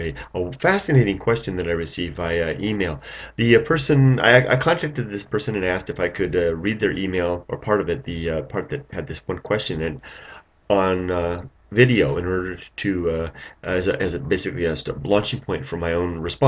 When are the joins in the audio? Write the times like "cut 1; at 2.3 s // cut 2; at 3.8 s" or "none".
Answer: cut 1; at 12.6 s

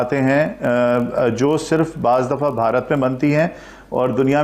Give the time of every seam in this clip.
none

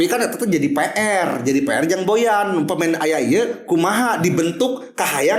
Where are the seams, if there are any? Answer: none

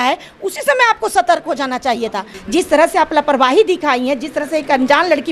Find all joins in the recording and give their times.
cut 1; at 2.3 s

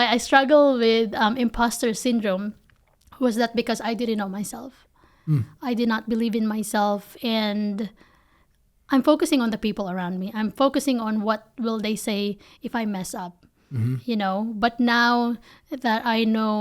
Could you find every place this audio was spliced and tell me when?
none

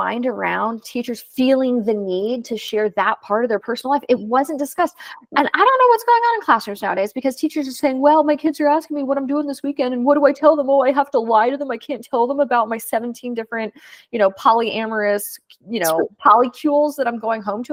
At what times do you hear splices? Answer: none

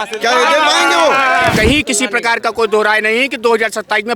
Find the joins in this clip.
cut 1; at 1.5 s

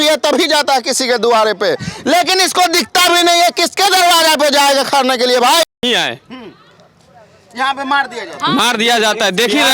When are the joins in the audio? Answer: cut 1; at 5.8 s

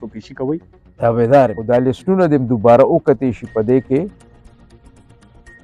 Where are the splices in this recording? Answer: cut 1; at 1.6 s

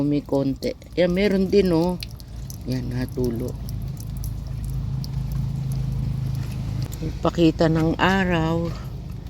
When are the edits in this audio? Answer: cut 1; at 6.8 s

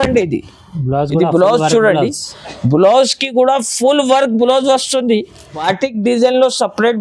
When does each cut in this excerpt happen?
cut 1; at 5.5 s

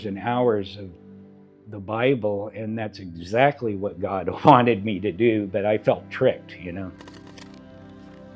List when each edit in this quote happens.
cut 1; at 7.4 s

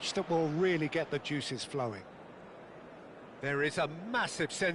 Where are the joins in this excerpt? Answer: cut 1; at 2.0 s // cut 2; at 3.4 s

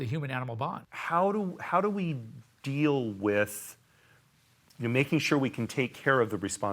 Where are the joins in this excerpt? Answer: cut 1; at 0.9 s

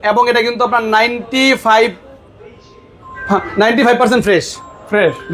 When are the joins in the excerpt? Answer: none

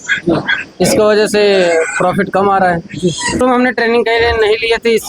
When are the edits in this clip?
cut 1; at 3.4 s

